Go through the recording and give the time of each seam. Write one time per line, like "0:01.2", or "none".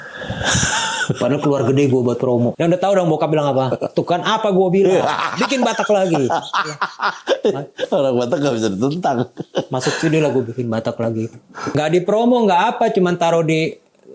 0:02.5
0:11.6